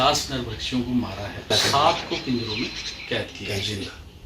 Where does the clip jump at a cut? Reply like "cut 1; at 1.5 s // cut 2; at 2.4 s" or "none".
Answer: cut 1; at 1.5 s